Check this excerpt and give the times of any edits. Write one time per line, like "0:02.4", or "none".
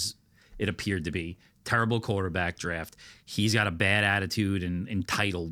none